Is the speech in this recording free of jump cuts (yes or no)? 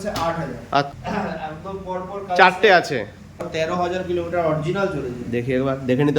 no